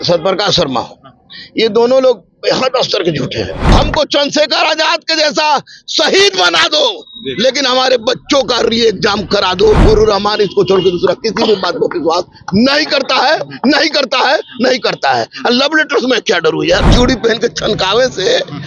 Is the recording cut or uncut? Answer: cut